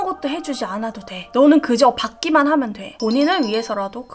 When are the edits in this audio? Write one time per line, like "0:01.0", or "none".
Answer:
0:02.8